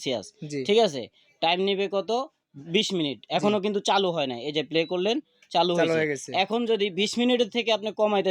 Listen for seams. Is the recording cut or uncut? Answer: uncut